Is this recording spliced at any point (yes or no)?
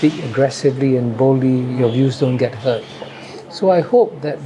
yes